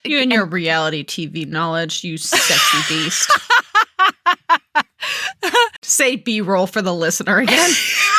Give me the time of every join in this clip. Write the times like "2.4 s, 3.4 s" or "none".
5.8 s